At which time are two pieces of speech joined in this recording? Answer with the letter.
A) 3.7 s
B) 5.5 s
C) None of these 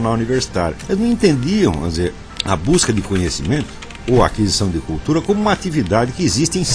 C